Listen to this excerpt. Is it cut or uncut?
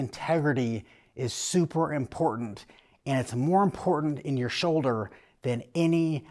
uncut